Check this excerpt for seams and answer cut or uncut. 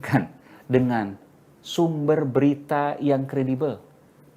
uncut